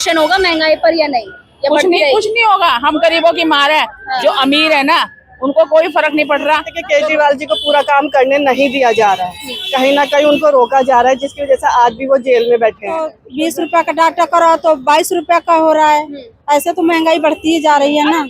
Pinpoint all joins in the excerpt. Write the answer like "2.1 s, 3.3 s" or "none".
6.7 s, 13.2 s